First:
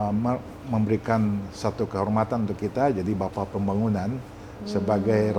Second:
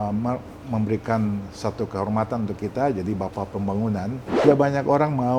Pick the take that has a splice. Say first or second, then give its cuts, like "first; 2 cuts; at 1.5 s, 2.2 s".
second; 1 cut; at 4.4 s